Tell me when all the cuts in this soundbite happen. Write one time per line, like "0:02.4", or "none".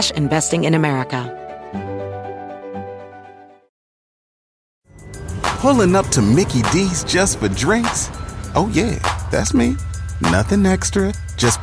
0:01.3